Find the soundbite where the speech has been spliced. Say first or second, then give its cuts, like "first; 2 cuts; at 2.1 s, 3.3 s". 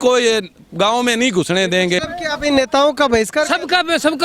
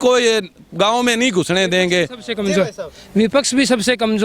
first; 1 cut; at 2.0 s